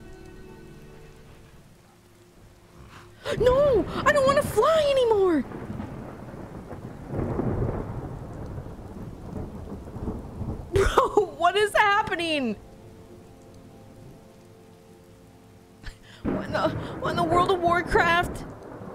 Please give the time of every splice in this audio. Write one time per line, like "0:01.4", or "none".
0:01.6